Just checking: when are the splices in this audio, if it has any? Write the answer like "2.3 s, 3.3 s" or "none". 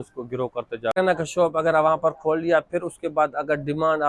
1.0 s